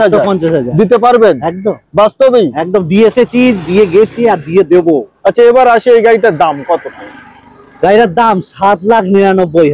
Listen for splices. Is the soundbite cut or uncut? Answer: uncut